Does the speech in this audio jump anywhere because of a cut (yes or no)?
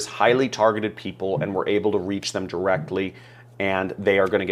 no